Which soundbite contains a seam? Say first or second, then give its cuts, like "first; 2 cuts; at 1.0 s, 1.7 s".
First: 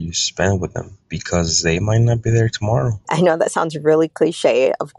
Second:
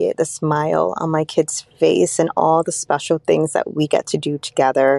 first; 1 cut; at 3.0 s